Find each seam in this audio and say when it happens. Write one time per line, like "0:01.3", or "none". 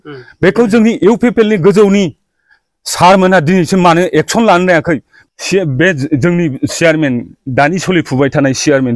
0:05.1